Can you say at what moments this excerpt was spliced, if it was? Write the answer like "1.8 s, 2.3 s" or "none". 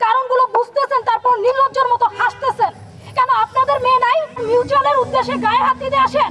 4.4 s